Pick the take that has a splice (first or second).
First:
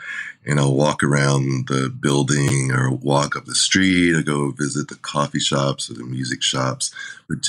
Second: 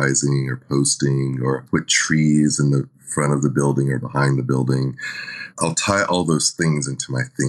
second